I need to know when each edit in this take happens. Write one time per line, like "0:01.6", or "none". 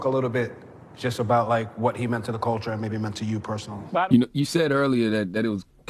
0:04.1